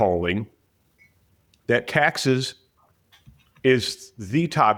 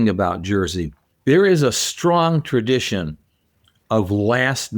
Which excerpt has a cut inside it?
second; 1 cut; at 1.1 s

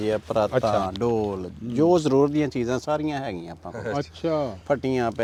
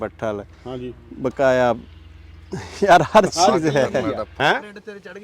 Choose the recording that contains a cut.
second; 1 cut; at 4.3 s

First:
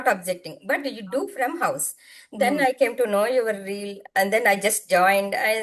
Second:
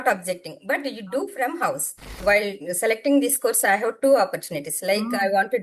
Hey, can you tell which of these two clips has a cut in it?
second; 1 cut; at 2.2 s

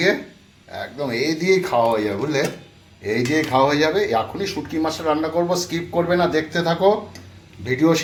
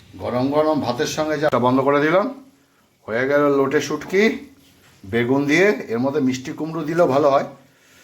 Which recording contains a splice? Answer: second; 1 cut; at 1.5 s

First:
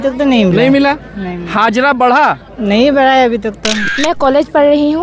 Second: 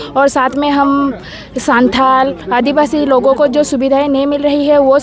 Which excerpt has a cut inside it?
first; 2 cuts; at 2.5 s, 3.8 s

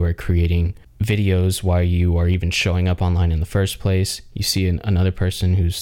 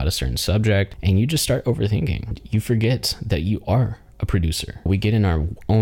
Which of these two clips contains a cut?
second; 3 cuts; at 0.9 s, 2.4 s, 4.9 s

